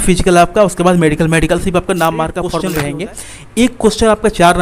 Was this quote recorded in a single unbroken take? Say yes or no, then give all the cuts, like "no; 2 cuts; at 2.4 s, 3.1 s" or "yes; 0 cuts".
no; 1 cut; at 2.6 s